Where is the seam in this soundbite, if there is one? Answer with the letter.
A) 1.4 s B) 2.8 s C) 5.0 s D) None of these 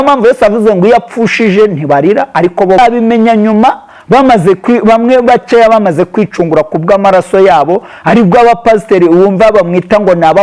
B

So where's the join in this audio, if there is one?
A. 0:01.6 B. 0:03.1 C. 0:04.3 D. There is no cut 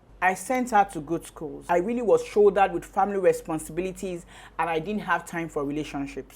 A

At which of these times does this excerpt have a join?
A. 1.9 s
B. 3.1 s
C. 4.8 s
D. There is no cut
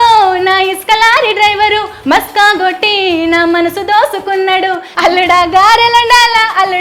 C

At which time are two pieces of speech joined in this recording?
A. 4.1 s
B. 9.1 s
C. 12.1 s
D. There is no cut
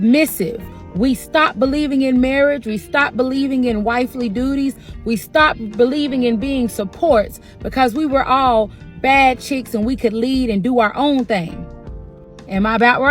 C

